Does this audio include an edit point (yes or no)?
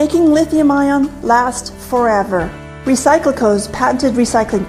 yes